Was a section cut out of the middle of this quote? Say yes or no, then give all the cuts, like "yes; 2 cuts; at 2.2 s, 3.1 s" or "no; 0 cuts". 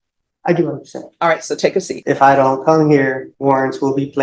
yes; 2 cuts; at 1.9 s, 3.3 s